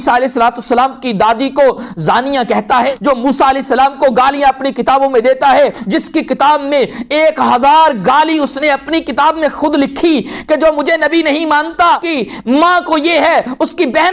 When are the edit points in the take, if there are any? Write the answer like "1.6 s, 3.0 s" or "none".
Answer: 2.9 s, 5.8 s, 12.1 s